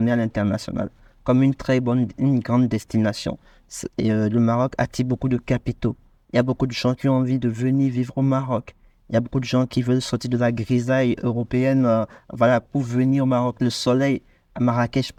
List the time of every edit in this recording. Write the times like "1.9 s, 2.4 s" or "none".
none